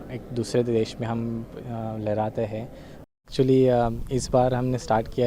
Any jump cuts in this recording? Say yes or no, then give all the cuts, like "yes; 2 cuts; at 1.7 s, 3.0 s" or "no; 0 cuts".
yes; 1 cut; at 3.2 s